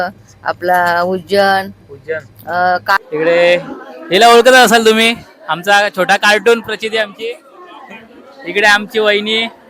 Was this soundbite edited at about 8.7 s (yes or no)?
no